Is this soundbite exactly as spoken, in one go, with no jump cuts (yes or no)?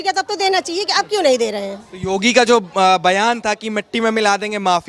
yes